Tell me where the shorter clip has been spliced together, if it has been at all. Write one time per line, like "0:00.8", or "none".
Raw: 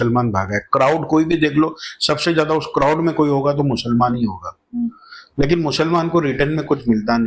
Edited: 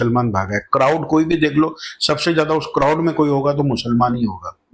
none